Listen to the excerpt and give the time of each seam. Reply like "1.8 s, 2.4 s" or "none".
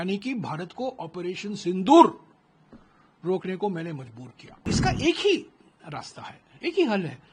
4.6 s